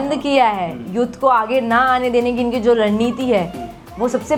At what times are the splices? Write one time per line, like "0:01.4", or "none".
none